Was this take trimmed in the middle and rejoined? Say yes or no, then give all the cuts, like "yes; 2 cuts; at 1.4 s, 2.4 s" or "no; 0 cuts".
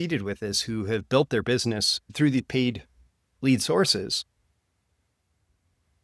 yes; 1 cut; at 2.0 s